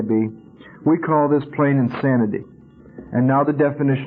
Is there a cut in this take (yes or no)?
no